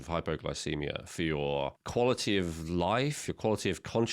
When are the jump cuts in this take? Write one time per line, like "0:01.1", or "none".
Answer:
0:01.8